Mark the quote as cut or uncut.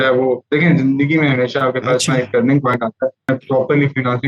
cut